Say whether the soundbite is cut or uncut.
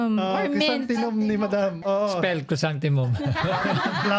cut